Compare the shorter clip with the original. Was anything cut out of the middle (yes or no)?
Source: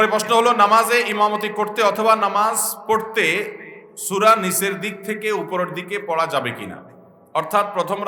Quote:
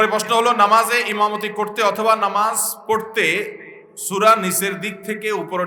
no